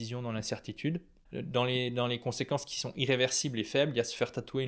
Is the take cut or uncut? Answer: cut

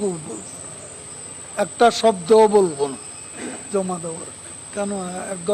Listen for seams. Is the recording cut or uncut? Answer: cut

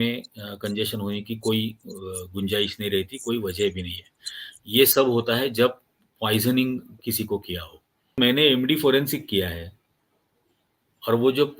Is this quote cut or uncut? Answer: cut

